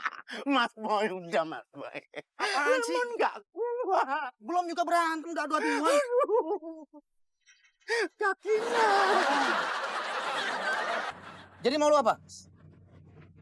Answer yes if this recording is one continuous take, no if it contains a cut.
no